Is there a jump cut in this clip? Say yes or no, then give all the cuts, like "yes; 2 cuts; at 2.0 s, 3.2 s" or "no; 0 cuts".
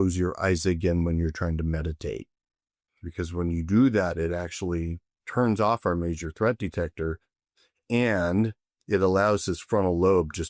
no; 0 cuts